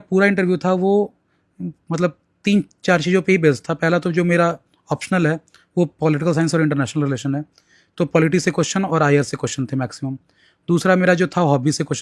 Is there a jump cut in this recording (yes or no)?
no